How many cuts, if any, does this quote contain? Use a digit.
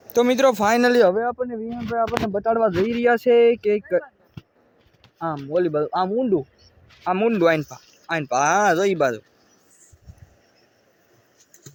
0